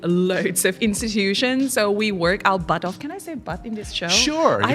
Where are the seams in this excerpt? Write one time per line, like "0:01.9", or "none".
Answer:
none